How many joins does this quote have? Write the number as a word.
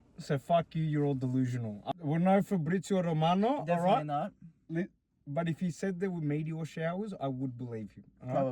one